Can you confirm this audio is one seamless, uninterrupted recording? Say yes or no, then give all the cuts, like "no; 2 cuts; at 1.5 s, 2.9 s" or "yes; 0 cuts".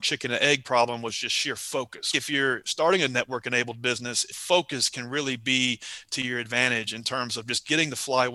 no; 2 cuts; at 2.1 s, 4.4 s